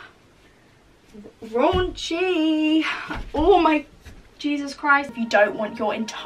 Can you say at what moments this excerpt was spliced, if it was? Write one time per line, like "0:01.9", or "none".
0:05.1